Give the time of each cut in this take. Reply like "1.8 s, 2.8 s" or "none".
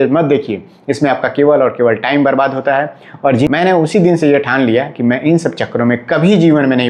3.5 s